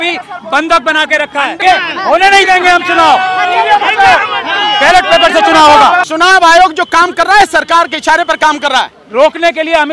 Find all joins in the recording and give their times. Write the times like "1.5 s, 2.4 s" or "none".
1.6 s, 6.0 s, 9.0 s